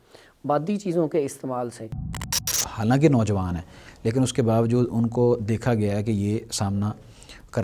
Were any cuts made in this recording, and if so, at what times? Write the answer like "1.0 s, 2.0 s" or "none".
2.3 s

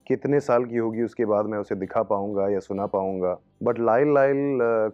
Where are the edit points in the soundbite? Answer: none

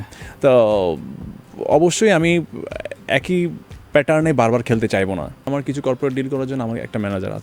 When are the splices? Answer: 5.5 s

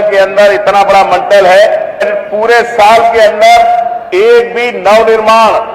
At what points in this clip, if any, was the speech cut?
2.1 s

